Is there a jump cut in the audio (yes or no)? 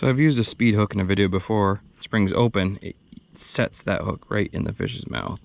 yes